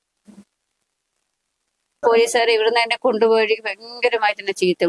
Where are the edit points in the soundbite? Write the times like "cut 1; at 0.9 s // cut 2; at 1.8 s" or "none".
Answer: cut 1; at 2.0 s